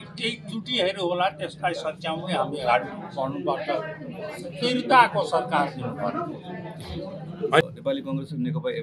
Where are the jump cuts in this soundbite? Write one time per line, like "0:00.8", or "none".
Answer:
0:07.7

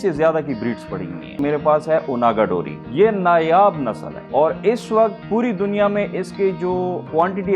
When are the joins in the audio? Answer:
0:01.3

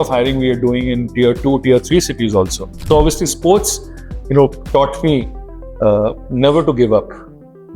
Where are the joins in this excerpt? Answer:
0:02.8

